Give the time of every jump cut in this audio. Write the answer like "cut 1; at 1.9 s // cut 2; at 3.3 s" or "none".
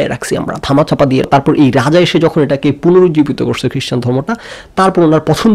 cut 1; at 1.3 s